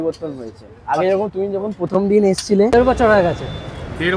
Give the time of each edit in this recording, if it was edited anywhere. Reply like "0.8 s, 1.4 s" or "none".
2.7 s